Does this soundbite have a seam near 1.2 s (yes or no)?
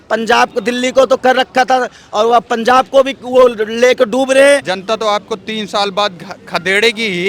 no